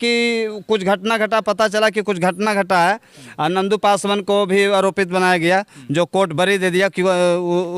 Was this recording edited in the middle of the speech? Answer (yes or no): no